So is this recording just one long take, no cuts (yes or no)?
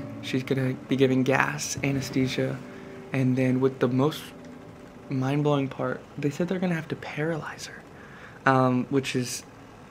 yes